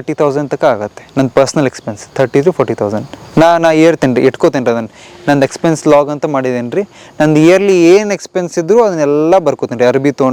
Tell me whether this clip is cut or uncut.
uncut